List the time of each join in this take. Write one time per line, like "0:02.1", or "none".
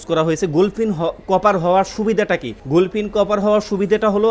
0:02.5